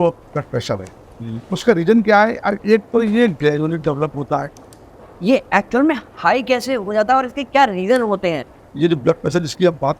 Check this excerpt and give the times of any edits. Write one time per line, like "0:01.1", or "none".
0:05.1
0:08.6

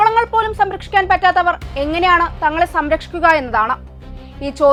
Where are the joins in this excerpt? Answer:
none

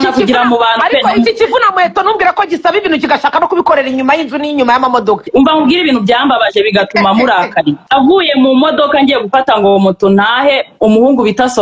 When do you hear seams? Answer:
0:05.2
0:07.8

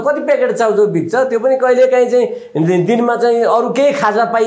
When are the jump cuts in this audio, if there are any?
none

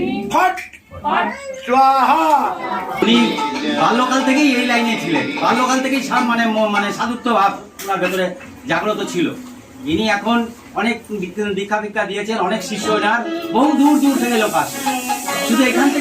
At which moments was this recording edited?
0:03.0

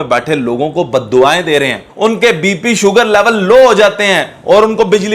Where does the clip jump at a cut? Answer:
0:01.9

